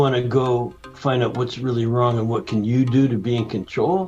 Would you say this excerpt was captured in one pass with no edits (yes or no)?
yes